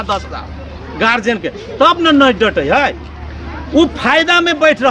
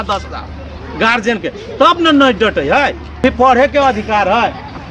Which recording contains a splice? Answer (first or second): second